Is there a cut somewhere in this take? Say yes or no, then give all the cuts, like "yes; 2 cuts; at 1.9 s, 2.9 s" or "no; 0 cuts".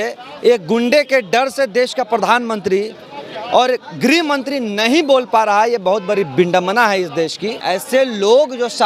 yes; 1 cut; at 7.6 s